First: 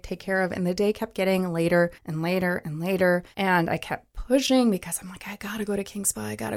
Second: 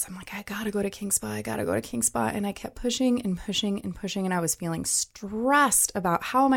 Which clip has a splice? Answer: first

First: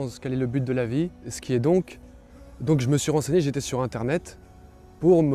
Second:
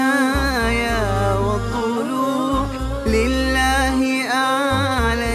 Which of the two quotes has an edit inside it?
first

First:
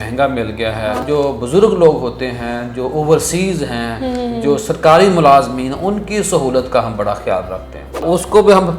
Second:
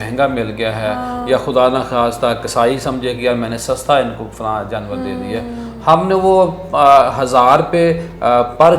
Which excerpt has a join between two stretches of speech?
first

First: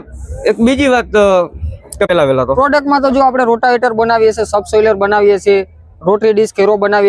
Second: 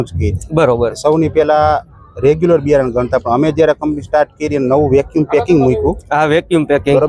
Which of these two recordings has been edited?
first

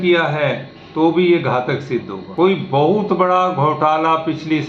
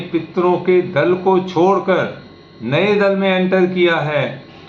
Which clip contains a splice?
first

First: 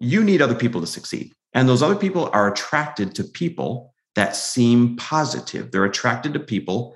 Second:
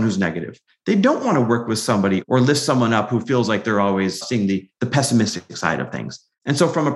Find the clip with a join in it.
second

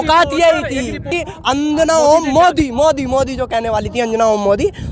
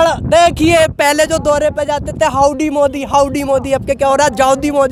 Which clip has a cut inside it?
first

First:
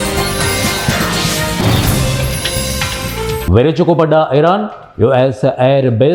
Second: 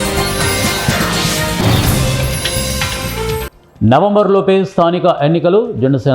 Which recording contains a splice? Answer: second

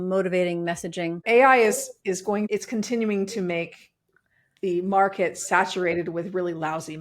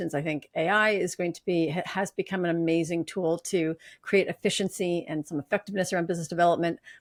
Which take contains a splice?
first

